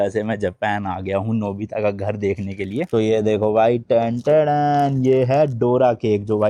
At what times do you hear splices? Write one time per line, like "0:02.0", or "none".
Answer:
0:02.9